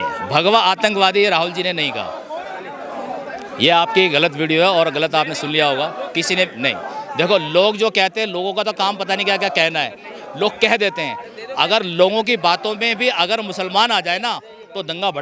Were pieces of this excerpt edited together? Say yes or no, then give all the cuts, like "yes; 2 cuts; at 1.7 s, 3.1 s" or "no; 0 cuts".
no; 0 cuts